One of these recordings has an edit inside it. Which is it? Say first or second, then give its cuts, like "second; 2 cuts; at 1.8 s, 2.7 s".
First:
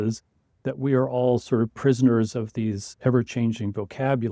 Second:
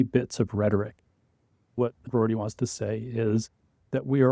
second; 1 cut; at 1.8 s